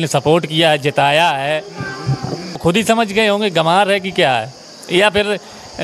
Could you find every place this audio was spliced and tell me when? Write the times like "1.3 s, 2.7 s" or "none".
2.6 s